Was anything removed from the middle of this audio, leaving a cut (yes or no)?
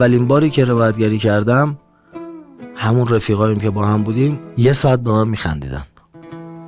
yes